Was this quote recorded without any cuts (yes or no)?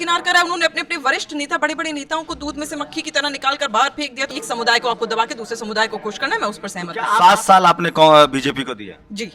no